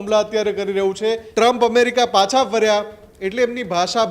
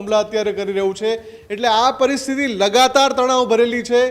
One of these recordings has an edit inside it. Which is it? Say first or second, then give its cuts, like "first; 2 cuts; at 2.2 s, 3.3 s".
first; 1 cut; at 1.2 s